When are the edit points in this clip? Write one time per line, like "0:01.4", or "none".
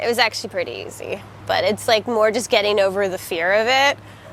none

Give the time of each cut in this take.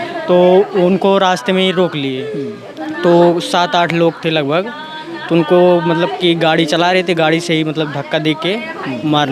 none

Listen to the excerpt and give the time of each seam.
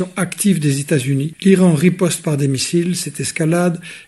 0:01.3

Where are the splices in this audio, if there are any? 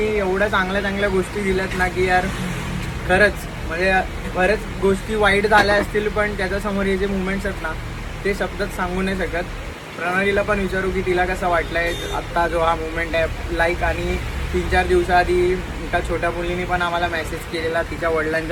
none

